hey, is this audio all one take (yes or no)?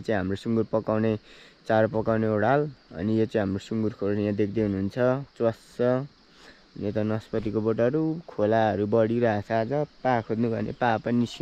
yes